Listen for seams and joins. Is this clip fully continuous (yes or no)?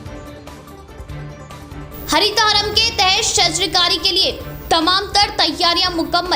yes